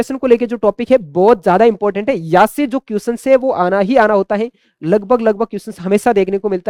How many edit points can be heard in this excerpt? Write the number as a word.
zero